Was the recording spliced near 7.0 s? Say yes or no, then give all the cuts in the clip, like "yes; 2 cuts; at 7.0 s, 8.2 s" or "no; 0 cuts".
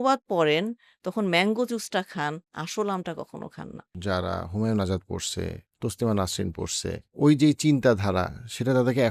no; 1 cut; at 3.8 s